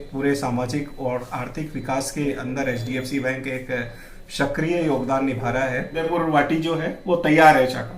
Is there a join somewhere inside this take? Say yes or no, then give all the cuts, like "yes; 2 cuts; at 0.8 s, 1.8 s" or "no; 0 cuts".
yes; 1 cut; at 5.9 s